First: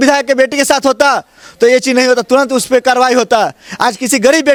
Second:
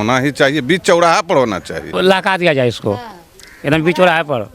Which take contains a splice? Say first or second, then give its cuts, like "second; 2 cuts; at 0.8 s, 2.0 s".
second; 1 cut; at 1.9 s